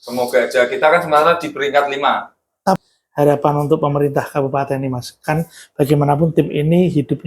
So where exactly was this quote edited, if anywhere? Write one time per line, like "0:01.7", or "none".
0:02.8

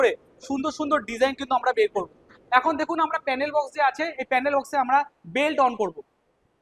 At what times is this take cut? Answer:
none

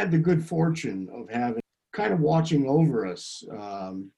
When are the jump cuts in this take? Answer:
0:01.6

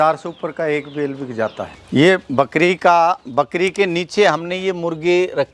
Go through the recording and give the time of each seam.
0:01.7

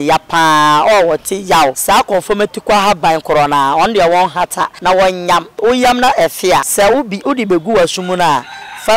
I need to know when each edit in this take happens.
0:01.8
0:04.7
0:05.5
0:06.7

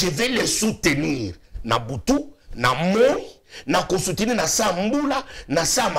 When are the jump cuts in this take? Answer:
none

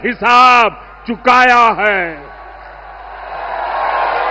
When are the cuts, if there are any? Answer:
none

